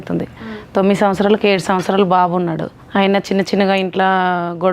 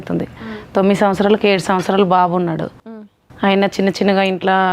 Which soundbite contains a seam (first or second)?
first